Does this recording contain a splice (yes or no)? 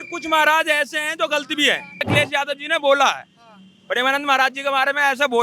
yes